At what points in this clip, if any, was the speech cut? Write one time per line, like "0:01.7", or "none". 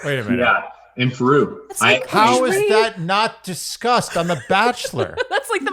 0:01.7